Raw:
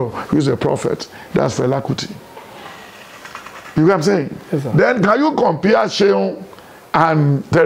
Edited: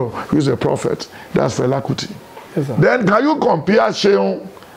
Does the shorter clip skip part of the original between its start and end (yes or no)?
yes